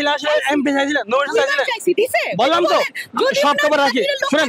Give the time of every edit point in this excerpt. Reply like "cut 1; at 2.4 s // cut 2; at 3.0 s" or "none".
none